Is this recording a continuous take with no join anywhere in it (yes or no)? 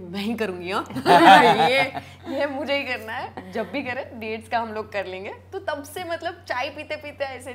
yes